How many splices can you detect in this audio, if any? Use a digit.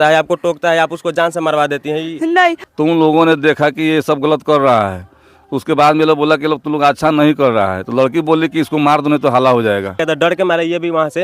2